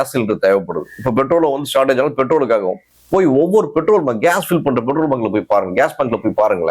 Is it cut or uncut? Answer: uncut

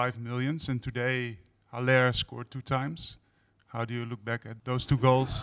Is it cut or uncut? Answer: cut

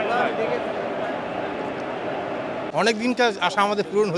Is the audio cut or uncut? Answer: uncut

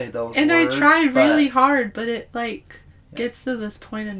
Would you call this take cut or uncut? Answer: uncut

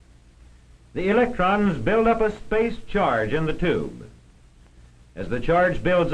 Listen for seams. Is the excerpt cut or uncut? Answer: uncut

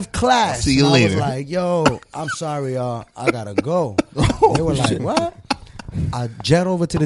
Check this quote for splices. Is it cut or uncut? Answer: uncut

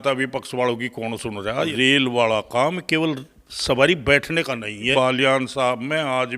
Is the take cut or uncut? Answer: cut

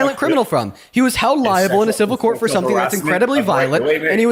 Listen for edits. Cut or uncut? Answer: uncut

